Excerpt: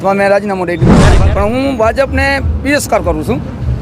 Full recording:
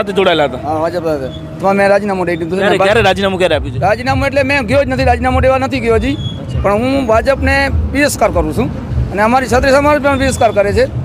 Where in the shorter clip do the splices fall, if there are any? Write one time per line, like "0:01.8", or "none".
0:01.1